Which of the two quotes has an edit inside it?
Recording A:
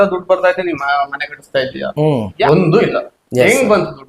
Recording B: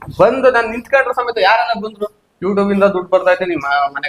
A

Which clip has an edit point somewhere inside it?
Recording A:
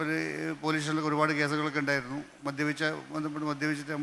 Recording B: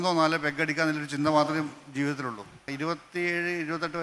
B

